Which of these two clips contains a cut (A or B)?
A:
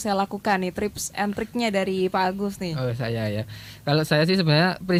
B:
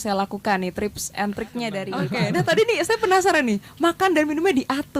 B